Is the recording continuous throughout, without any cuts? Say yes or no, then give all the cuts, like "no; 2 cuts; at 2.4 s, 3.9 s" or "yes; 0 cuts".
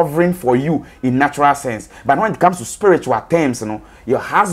yes; 0 cuts